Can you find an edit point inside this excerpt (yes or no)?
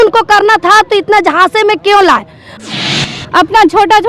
yes